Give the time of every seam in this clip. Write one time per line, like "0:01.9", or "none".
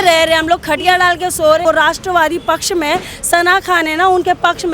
0:01.6